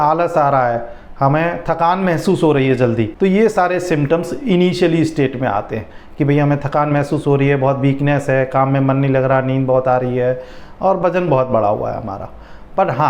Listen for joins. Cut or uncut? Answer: uncut